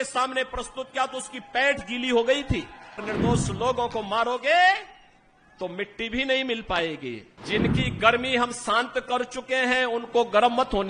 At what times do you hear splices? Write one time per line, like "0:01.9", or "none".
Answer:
0:03.0
0:07.3